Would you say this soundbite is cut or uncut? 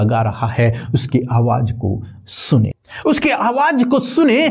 cut